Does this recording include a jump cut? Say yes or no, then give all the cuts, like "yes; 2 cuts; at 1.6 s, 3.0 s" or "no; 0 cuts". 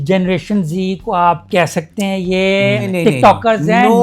yes; 1 cut; at 2.9 s